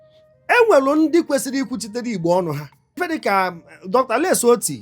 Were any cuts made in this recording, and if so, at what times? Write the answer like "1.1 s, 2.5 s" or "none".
3.0 s